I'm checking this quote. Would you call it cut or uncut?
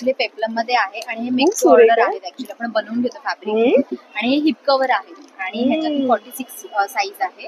uncut